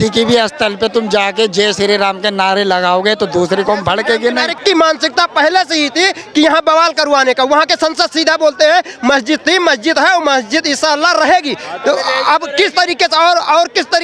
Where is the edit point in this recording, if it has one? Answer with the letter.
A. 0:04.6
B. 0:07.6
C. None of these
A